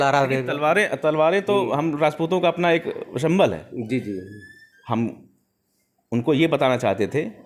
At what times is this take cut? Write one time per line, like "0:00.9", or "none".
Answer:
none